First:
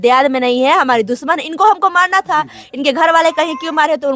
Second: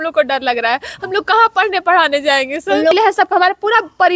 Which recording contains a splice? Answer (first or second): second